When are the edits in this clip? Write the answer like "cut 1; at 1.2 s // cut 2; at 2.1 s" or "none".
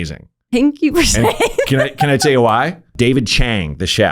cut 1; at 2.9 s